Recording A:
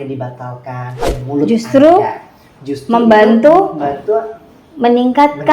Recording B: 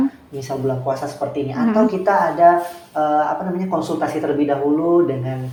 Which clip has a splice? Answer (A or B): A